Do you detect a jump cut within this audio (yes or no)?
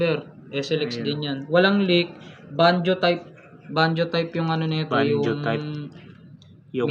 no